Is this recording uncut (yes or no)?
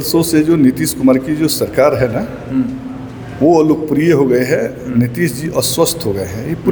yes